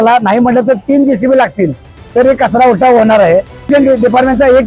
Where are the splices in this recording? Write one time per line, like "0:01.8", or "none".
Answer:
0:03.7